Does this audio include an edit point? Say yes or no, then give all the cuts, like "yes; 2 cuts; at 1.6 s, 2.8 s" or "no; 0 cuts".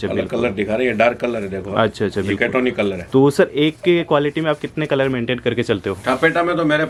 no; 0 cuts